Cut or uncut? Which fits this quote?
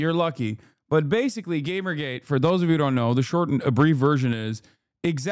uncut